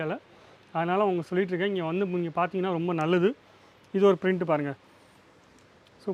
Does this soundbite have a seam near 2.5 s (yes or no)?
no